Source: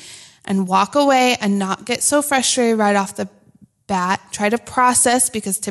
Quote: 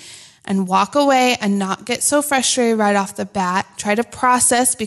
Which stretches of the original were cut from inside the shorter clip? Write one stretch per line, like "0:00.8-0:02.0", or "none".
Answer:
0:03.2-0:03.7